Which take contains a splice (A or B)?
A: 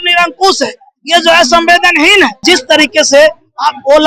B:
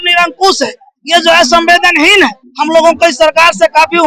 A